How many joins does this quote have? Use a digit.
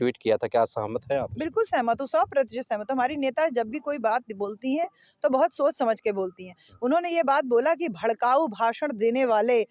0